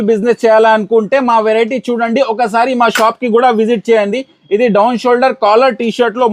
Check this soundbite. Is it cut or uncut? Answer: uncut